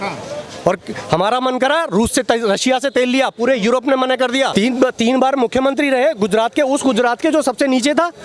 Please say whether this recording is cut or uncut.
cut